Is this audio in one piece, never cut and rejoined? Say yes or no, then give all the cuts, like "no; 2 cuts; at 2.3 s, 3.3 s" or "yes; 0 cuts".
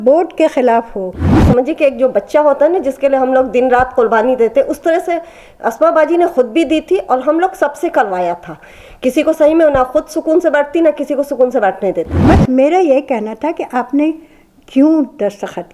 no; 2 cuts; at 1.3 s, 12.1 s